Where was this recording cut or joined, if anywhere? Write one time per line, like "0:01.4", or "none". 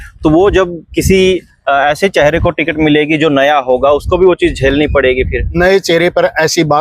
0:05.6